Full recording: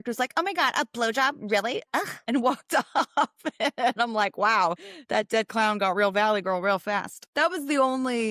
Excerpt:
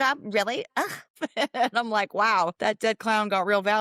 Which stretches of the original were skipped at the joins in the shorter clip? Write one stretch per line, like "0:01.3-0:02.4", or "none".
0:02.2-0:03.3
0:04.8-0:05.0

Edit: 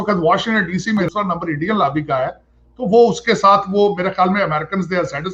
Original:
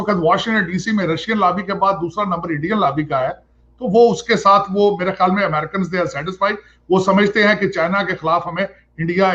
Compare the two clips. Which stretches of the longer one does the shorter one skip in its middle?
0:01.1-0:02.1

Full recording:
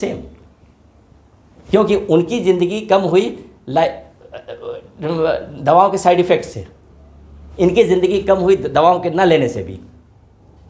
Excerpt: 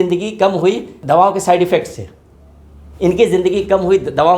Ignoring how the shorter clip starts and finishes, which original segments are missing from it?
0:03.4-0:05.5

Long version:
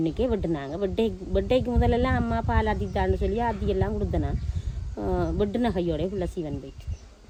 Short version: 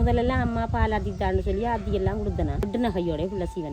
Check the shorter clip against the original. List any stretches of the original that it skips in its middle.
0:04.4-0:05.5

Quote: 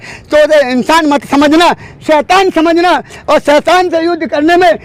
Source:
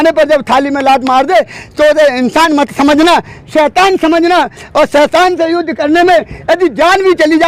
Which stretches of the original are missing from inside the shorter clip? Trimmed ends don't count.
none

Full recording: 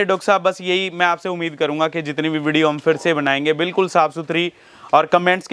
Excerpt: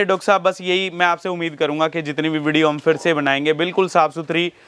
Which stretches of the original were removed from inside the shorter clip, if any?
none

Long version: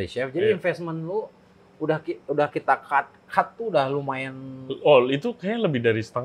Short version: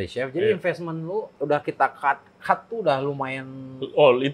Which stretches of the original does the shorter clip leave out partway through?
0:01.3-0:02.2

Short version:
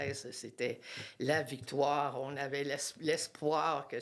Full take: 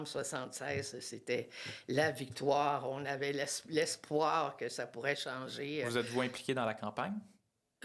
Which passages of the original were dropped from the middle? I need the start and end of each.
none

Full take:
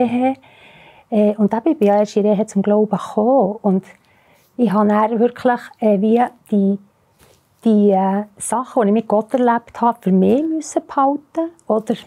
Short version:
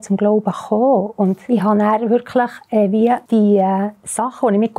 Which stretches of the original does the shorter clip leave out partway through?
0:03.9-0:04.5
0:06.3-0:07.6

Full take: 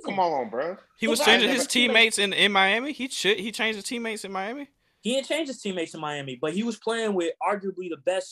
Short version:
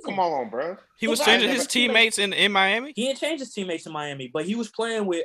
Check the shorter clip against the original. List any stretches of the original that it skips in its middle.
0:02.9-0:05.0

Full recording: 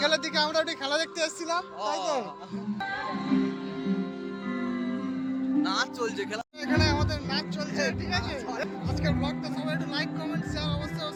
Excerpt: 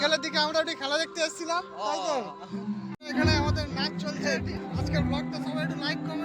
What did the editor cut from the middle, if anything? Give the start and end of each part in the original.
0:02.9-0:06.4
0:08.1-0:08.7

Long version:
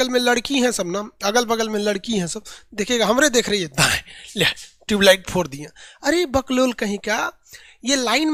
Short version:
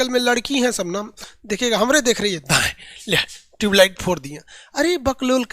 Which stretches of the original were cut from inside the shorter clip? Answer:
0:01.1-0:02.4

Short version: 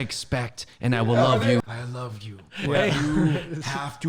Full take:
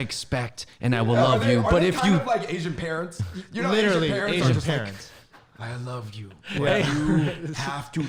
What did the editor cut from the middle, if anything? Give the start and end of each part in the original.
0:01.6-0:05.5

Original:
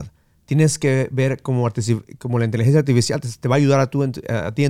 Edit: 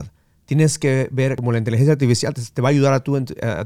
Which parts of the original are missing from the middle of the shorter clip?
0:01.4-0:02.2

